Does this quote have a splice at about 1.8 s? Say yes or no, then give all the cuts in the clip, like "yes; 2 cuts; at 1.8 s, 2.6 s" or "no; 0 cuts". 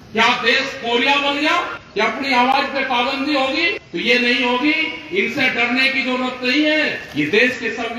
yes; 3 cuts; at 1.8 s, 3.8 s, 7.0 s